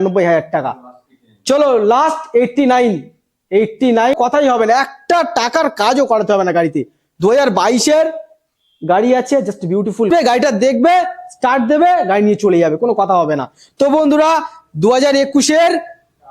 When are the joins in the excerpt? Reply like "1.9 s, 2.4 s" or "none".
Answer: 4.1 s, 10.1 s